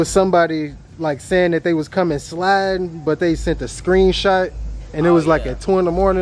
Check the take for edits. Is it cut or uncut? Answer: uncut